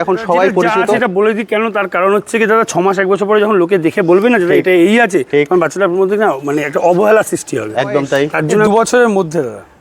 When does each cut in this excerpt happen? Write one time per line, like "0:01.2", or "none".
0:01.0
0:08.7